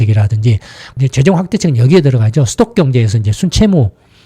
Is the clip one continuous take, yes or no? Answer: no